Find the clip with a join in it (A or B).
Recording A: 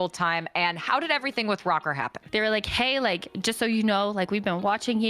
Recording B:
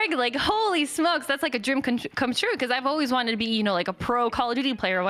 A